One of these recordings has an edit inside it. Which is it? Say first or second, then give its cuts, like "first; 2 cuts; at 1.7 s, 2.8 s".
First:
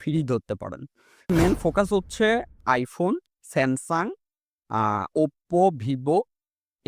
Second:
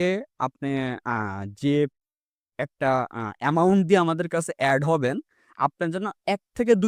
first; 1 cut; at 1.3 s